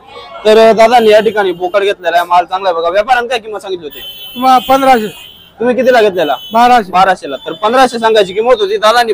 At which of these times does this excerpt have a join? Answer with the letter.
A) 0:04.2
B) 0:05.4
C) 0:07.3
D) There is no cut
D